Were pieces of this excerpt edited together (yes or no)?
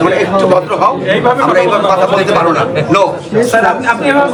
no